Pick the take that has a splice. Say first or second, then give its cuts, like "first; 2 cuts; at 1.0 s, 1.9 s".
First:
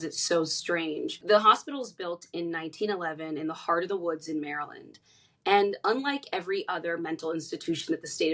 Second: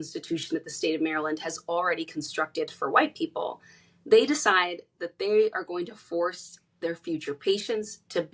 first; 1 cut; at 1.2 s